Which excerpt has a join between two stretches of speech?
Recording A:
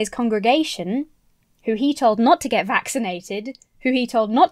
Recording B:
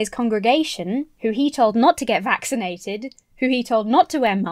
B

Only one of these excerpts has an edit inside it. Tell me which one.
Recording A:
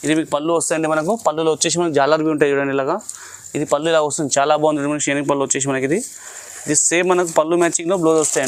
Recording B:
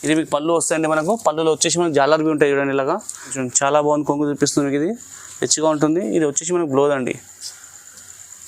B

